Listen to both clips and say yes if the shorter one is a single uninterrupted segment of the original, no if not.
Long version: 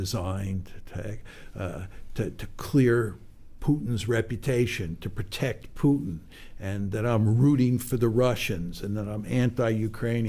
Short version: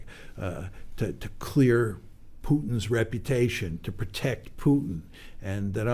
yes